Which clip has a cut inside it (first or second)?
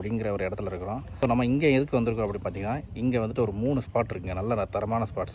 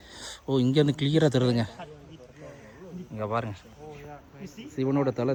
first